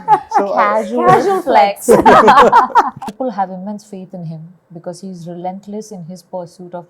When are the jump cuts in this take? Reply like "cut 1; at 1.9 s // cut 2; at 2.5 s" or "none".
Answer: cut 1; at 3.0 s